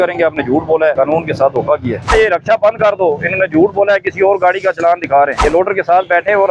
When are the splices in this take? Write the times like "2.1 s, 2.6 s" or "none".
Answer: 0.9 s, 2.1 s, 5.4 s

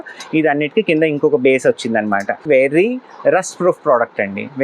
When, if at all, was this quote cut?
2.4 s

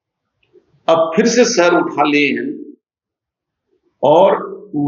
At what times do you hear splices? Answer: none

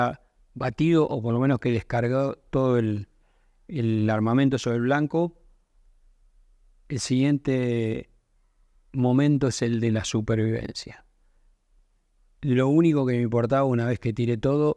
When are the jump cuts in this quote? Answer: none

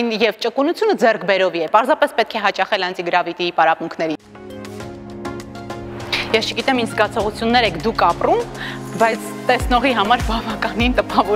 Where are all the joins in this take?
4.3 s

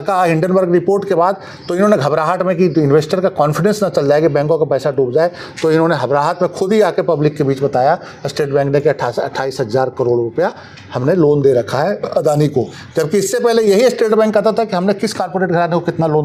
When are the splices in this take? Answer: none

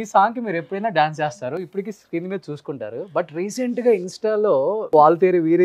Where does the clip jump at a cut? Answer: none

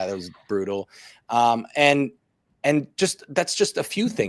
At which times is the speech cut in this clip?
none

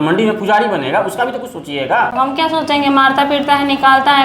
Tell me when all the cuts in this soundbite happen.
2.1 s

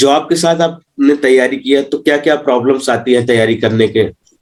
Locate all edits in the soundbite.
none

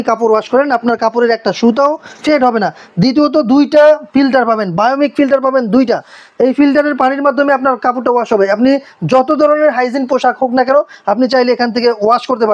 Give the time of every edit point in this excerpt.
none

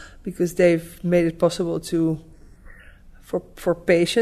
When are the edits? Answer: none

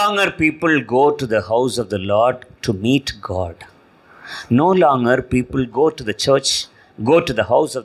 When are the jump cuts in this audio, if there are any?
none

